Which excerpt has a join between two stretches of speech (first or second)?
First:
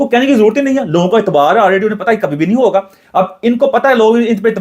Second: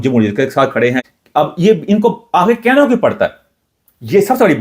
second